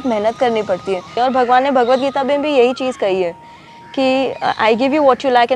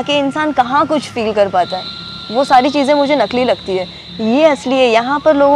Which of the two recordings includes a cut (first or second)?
first